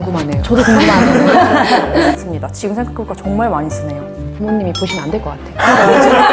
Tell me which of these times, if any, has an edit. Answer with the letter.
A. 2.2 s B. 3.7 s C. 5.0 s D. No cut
A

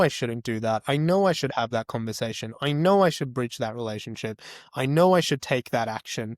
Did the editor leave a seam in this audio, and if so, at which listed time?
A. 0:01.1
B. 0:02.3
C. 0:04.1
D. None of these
D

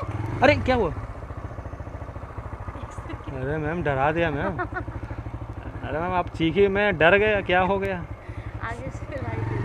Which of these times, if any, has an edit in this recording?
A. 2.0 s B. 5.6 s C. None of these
B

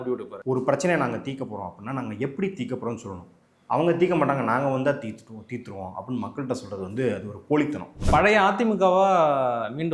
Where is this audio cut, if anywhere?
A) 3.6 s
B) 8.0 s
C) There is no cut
B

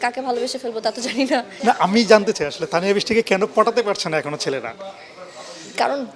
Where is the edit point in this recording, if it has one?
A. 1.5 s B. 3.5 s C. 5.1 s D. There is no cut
A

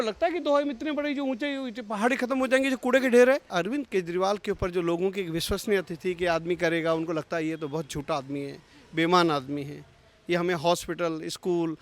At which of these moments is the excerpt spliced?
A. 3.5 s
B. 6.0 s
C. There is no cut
A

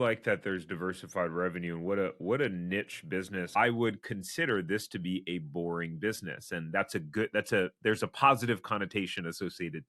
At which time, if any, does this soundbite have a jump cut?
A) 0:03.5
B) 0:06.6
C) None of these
A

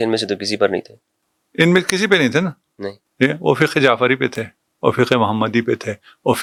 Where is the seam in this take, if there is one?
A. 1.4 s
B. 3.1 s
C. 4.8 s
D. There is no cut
D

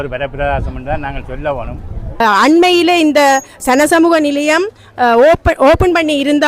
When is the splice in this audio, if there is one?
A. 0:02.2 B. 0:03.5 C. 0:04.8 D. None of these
A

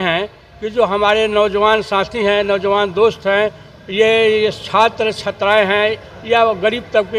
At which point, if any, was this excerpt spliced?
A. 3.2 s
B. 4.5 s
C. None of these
C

